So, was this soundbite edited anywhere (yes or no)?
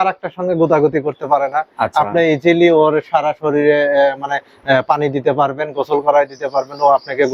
no